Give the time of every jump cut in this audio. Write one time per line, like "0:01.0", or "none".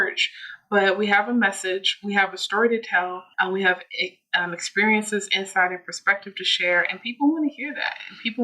0:03.2